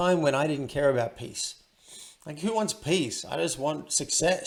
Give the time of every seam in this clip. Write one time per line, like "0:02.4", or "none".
none